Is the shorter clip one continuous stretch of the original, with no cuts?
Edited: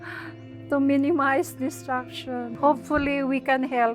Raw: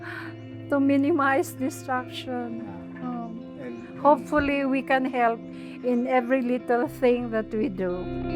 no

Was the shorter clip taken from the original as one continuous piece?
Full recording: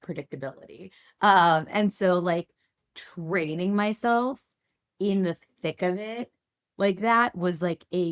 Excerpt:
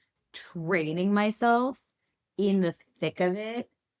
yes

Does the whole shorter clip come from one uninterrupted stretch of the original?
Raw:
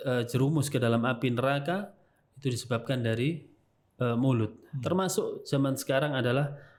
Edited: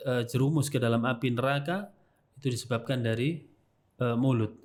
yes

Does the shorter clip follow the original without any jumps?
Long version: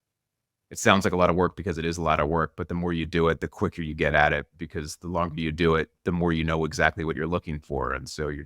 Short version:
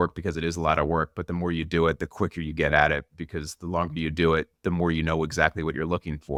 yes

